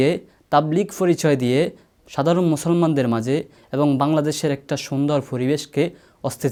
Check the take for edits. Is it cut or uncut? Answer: uncut